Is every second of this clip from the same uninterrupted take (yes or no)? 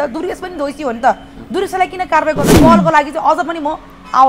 no